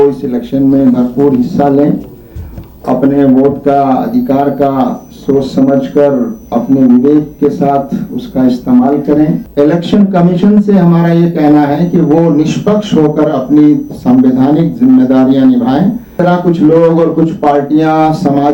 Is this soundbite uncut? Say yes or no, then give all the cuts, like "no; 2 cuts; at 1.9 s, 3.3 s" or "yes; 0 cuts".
no; 2 cuts; at 9.4 s, 16.1 s